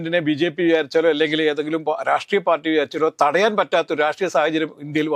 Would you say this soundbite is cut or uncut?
uncut